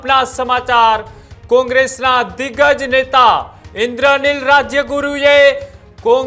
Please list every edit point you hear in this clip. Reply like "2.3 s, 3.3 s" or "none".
none